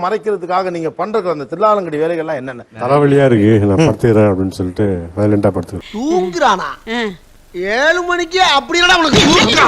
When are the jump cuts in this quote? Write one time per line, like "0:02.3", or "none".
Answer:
0:02.7
0:05.8